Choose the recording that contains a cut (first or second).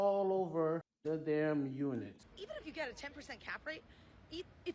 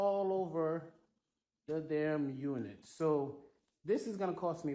first